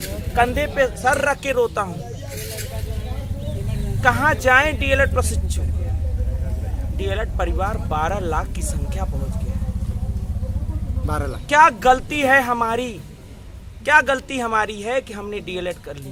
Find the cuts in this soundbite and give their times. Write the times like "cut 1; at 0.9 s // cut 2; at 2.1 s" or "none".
none

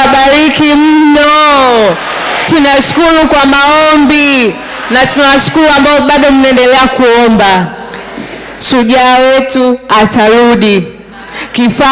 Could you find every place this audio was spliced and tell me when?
none

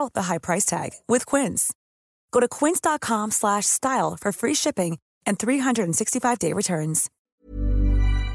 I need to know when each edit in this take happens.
cut 1; at 7.1 s

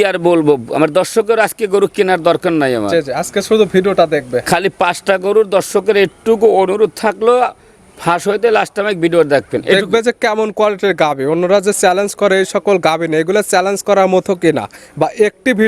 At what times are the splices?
none

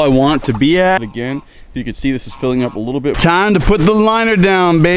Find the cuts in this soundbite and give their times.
cut 1; at 1.1 s // cut 2; at 3.2 s

